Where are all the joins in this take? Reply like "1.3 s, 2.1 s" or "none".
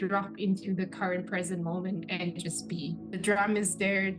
3.2 s